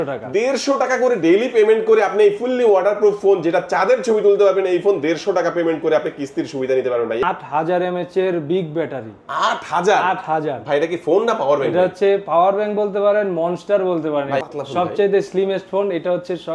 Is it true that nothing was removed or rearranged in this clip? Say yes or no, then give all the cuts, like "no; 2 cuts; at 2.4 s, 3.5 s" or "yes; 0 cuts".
no; 2 cuts; at 7.2 s, 14.4 s